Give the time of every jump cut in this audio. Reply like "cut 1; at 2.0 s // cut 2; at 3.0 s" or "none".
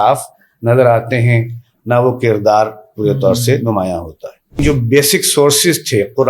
cut 1; at 4.6 s